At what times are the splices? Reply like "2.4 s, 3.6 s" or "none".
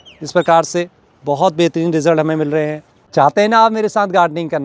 3.0 s